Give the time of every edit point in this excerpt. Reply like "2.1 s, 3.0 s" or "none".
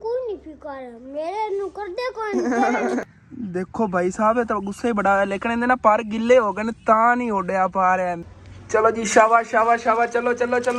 3.0 s, 8.3 s